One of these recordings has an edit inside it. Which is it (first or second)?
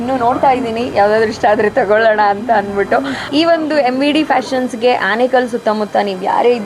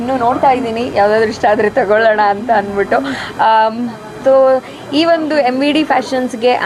first